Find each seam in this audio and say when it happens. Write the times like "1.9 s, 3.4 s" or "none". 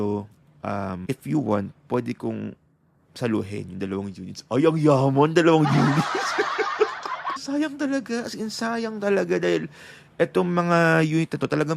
1.0 s, 7.4 s